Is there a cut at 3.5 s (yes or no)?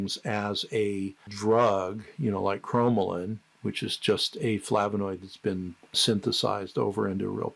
no